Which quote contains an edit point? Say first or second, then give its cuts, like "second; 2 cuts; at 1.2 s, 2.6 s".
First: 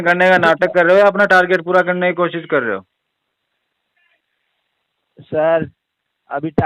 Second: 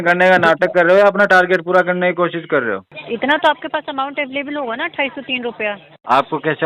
second; 1 cut; at 2.9 s